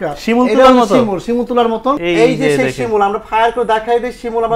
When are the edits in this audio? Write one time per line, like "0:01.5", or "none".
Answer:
0:02.0